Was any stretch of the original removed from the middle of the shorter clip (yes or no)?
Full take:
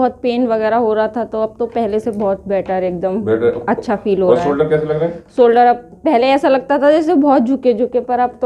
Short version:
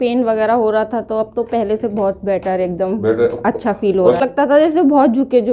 yes